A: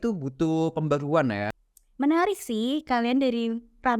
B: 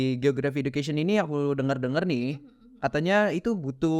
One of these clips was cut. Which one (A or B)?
A